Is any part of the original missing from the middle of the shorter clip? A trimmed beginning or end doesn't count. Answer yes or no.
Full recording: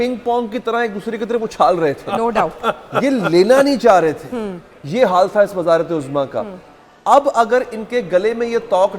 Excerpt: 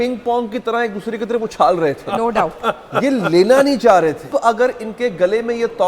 yes